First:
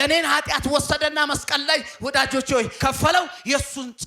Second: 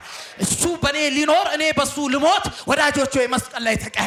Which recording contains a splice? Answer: first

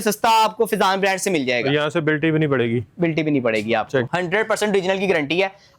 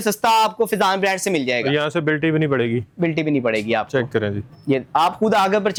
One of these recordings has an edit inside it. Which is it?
first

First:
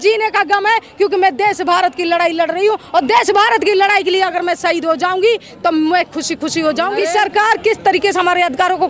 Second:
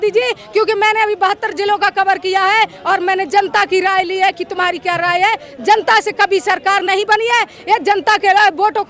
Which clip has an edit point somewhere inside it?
first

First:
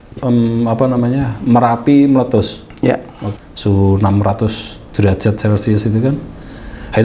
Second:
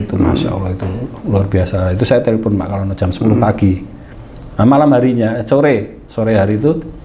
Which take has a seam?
first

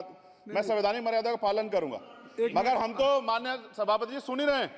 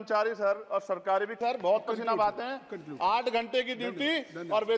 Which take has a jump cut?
second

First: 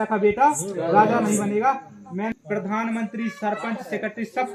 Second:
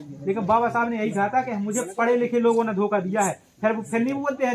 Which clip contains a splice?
first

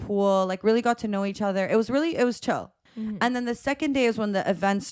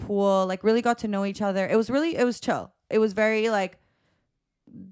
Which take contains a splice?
first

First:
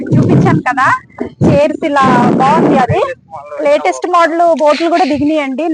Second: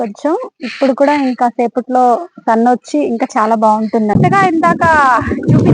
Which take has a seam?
second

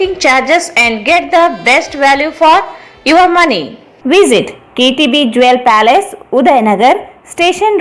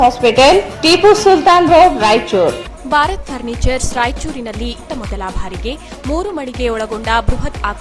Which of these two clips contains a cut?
second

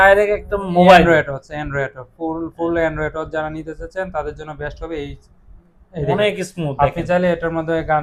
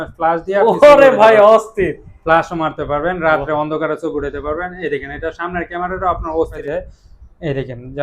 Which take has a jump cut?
second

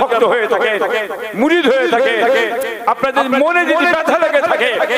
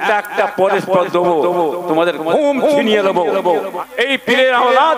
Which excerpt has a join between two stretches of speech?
second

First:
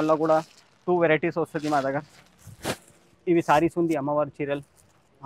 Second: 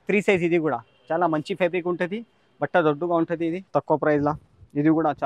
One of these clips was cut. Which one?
second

